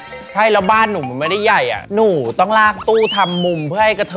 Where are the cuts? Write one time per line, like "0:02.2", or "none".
0:01.8